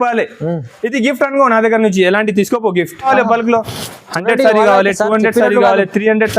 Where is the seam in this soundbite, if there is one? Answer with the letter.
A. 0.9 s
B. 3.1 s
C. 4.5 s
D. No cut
B